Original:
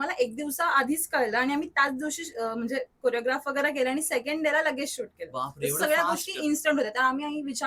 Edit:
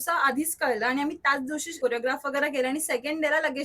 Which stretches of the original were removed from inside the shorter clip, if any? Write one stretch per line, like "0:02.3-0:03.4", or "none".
0:02.2-0:02.9